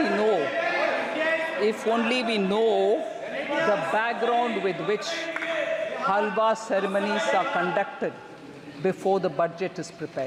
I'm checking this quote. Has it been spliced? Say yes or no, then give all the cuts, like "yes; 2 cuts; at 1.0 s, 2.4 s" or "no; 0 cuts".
no; 0 cuts